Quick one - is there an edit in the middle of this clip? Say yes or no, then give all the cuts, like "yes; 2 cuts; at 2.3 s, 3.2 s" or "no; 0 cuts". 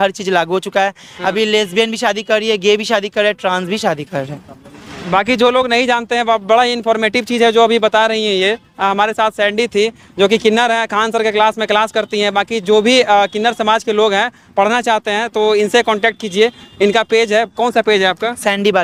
no; 0 cuts